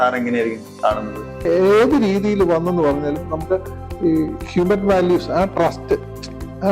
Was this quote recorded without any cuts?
no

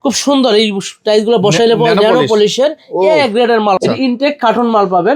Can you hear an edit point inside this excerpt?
yes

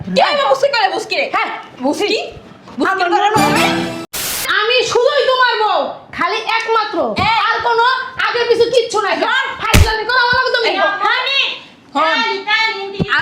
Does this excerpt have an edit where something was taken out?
yes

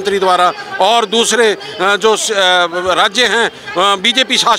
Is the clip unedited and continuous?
yes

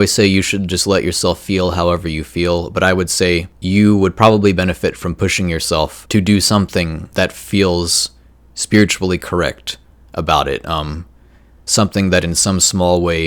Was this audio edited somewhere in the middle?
yes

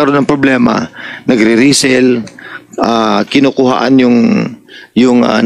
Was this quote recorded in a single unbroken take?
yes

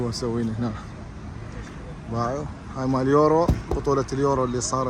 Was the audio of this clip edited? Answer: no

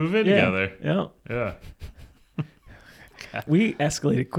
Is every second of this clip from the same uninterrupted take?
no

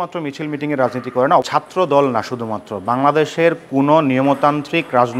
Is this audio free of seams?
no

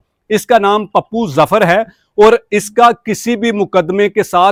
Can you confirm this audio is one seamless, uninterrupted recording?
yes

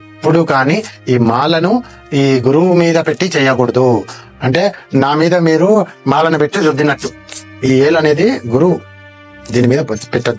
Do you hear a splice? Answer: no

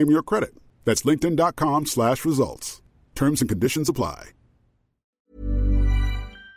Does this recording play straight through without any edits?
no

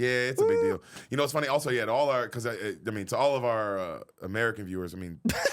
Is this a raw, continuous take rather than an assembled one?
yes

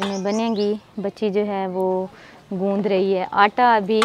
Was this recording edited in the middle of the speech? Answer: no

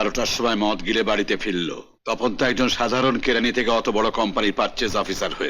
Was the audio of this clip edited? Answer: yes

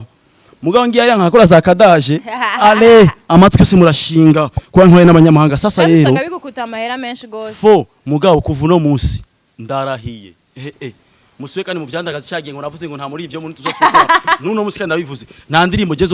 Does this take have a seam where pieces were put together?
no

